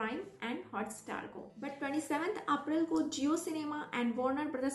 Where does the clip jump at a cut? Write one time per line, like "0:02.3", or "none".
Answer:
0:01.6